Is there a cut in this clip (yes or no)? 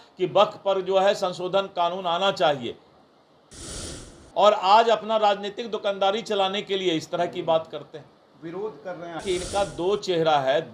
yes